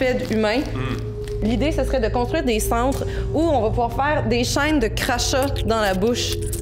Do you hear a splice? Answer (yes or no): yes